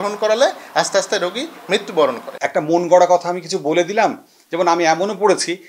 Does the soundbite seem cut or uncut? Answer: cut